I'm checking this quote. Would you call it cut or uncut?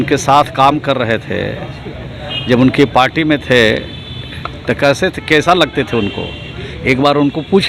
uncut